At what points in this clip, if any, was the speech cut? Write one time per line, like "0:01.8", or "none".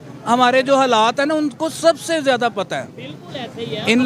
none